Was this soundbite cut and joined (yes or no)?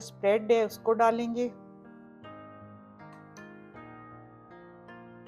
yes